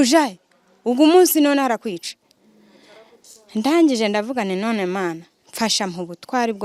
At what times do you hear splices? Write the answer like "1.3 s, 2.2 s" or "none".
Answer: none